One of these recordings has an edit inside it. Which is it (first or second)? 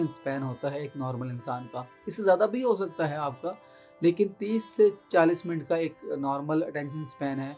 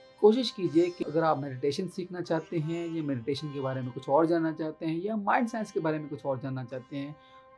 second